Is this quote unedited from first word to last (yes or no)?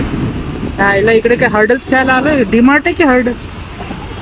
yes